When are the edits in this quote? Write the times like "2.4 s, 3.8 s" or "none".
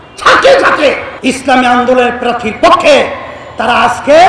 1.1 s